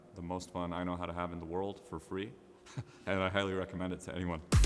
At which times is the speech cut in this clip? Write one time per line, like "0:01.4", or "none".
none